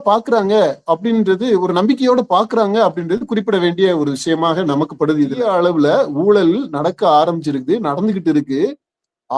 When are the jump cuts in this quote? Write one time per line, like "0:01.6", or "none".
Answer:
0:05.4